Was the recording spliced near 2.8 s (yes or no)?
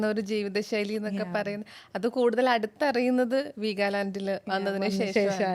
no